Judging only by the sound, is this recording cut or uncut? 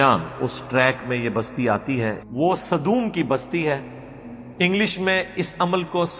cut